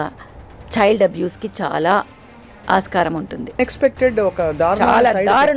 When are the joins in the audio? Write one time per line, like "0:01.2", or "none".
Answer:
0:03.6